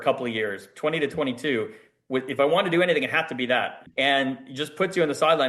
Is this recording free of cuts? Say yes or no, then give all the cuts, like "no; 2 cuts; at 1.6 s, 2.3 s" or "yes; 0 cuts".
no; 1 cut; at 3.8 s